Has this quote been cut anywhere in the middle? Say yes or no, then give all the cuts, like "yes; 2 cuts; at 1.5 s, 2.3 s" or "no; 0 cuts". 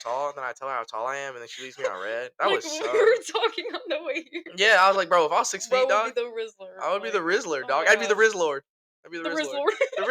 no; 0 cuts